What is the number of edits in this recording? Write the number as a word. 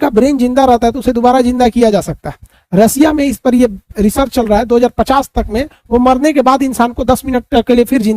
zero